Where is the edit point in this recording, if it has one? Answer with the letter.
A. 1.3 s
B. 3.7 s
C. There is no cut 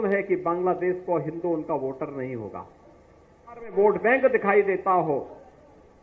B